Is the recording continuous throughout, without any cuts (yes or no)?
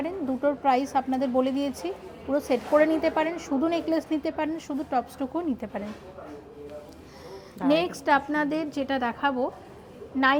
yes